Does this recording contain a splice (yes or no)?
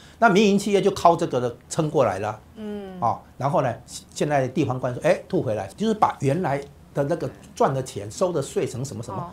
yes